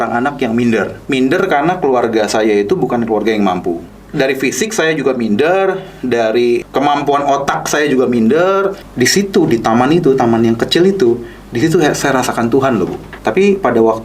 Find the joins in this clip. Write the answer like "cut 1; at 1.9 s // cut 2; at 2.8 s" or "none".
cut 1; at 1.0 s // cut 2; at 3.9 s // cut 3; at 6.7 s // cut 4; at 8.8 s // cut 5; at 13.1 s